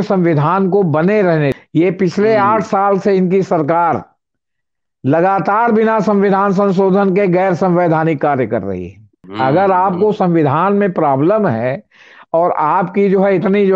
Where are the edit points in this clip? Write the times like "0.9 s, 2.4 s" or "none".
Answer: 1.5 s, 9.2 s